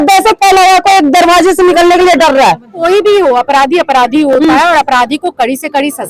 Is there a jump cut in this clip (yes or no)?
yes